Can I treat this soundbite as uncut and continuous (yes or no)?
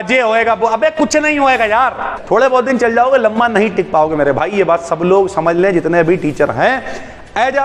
no